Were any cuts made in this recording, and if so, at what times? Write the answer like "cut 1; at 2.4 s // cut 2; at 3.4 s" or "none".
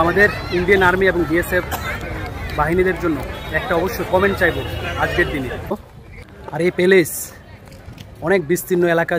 cut 1; at 5.7 s